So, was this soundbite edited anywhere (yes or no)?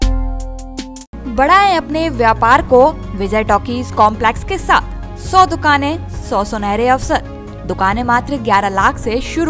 no